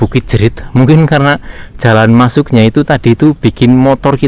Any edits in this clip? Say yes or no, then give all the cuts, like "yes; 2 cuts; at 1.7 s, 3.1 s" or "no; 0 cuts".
no; 0 cuts